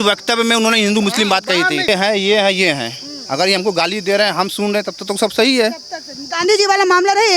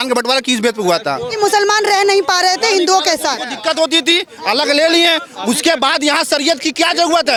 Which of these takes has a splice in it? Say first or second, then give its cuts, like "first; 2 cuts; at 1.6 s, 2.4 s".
first; 1 cut; at 1.9 s